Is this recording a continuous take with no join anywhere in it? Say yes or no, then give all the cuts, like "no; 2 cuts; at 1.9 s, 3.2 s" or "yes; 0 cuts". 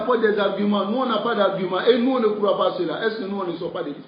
yes; 0 cuts